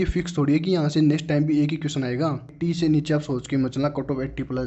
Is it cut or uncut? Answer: cut